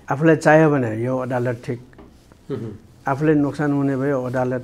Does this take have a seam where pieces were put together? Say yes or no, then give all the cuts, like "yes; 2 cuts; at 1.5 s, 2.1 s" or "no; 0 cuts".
no; 0 cuts